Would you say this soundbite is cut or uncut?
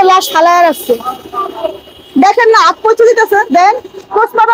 uncut